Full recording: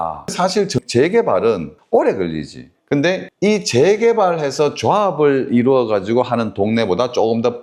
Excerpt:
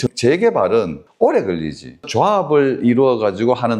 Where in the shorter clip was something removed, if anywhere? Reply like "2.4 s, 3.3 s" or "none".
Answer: 2.1 s